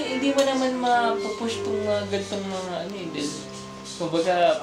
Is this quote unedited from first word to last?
yes; 0 cuts

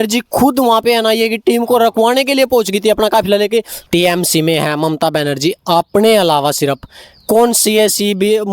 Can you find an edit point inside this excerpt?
yes; 1 cut; at 3.8 s

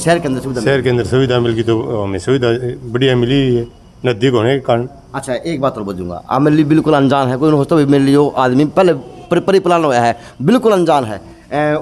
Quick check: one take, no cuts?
yes; 0 cuts

